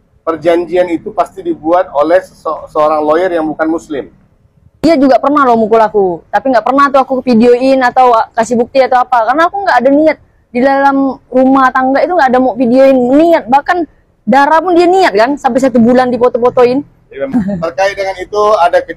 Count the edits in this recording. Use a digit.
2